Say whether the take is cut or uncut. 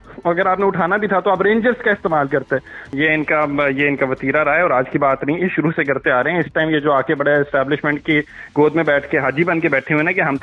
cut